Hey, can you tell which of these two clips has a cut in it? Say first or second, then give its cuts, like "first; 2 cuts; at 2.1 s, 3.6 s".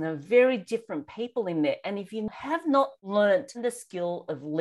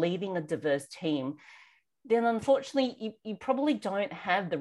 first; 2 cuts; at 2.7 s, 3.6 s